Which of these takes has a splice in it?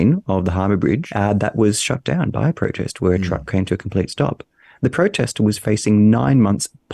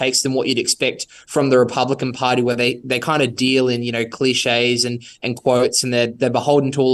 first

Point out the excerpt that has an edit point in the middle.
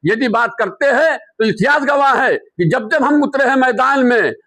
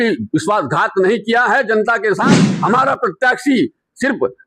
second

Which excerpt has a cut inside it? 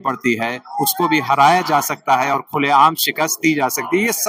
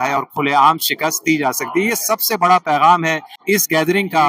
second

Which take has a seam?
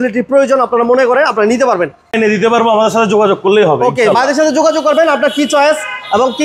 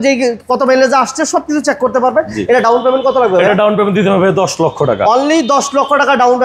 first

